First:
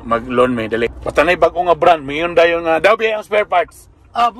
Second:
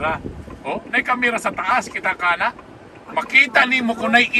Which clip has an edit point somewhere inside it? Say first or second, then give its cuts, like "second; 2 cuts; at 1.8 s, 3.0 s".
first; 1 cut; at 0.9 s